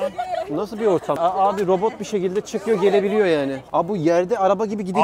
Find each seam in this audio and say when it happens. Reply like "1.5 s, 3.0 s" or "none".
1.2 s, 3.6 s